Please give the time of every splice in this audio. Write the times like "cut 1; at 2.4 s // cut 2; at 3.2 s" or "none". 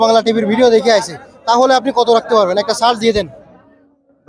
none